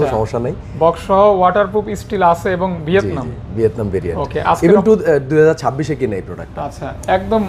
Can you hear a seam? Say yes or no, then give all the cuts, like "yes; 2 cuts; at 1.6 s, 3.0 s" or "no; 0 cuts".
no; 0 cuts